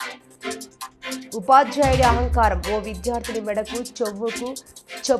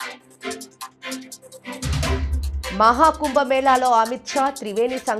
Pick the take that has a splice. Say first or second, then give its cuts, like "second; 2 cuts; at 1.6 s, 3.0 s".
first; 1 cut; at 1.2 s